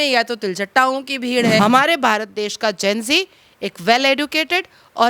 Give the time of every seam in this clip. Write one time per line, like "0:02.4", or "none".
0:01.6